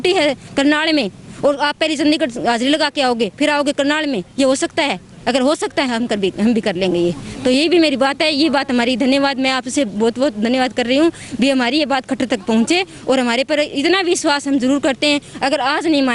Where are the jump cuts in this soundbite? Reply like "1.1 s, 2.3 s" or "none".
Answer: none